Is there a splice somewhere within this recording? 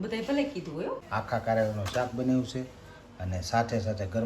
yes; 1 cut; at 1.0 s

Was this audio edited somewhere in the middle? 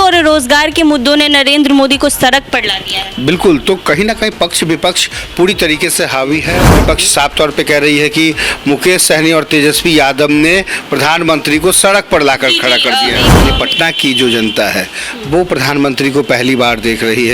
yes; 2 cuts; at 6.7 s, 13.3 s

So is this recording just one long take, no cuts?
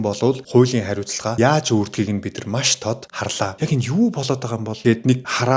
no; 1 cut; at 3.5 s

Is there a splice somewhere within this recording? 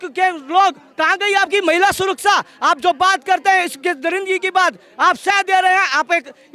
no; 0 cuts

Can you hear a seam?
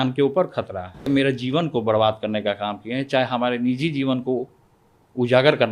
yes; 1 cut; at 1.1 s

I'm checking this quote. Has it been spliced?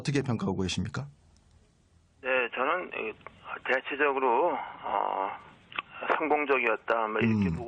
yes; 1 cut; at 3.5 s

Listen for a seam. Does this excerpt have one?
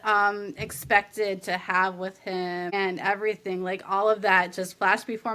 yes; 1 cut; at 2.7 s

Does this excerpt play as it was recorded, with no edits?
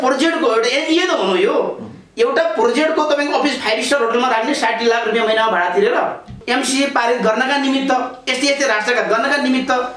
no; 1 cut; at 6.4 s

